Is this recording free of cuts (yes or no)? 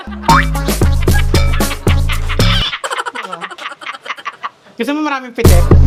yes